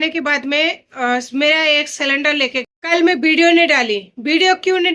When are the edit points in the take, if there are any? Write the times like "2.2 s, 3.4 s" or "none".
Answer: 2.7 s